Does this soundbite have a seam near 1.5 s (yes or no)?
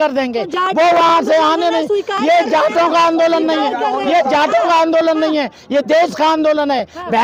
no